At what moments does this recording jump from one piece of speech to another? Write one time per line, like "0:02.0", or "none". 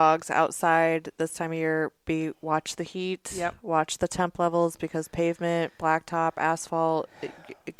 none